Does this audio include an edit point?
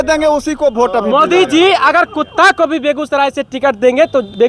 no; 0 cuts

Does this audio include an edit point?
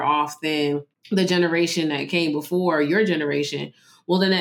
yes; 1 cut; at 0.9 s

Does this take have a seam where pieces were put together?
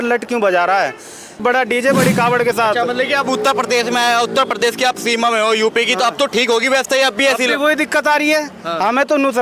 yes; 1 cut; at 1.4 s

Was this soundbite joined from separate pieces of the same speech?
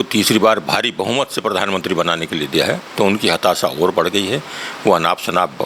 no; 0 cuts

